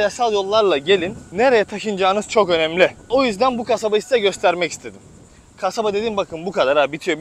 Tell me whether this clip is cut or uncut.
cut